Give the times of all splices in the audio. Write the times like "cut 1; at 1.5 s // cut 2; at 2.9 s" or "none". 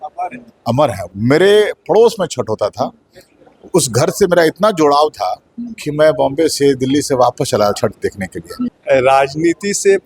cut 1; at 1.0 s // cut 2; at 8.8 s